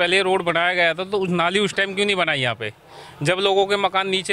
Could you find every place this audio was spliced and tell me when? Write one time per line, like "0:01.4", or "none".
none